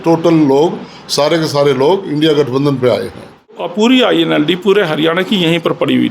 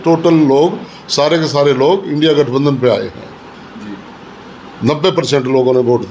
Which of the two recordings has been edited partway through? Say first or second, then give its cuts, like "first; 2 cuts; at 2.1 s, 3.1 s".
first; 1 cut; at 3.6 s